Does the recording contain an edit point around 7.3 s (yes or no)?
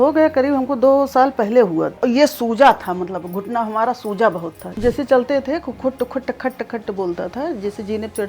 no